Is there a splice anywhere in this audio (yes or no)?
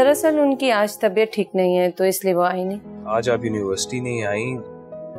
yes